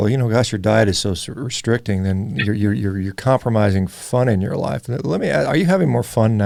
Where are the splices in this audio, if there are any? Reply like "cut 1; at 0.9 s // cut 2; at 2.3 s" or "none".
none